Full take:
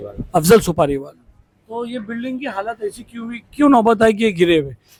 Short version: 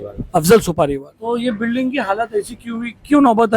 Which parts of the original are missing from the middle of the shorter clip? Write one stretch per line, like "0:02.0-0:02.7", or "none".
0:01.1-0:01.6